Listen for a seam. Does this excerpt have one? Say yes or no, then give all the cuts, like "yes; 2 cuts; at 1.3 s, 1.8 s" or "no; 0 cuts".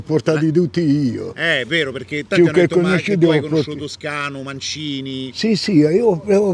no; 0 cuts